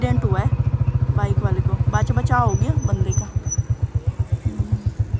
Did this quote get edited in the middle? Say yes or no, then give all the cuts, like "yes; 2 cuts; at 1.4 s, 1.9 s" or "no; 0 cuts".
no; 0 cuts